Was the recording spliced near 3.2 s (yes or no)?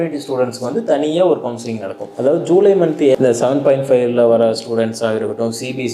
yes